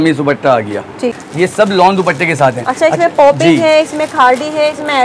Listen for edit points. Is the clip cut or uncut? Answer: cut